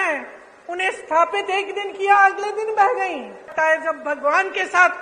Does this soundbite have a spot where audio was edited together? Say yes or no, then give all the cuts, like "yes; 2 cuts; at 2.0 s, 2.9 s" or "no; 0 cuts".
yes; 1 cut; at 3.5 s